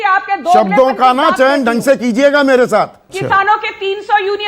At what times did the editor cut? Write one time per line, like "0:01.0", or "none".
0:03.2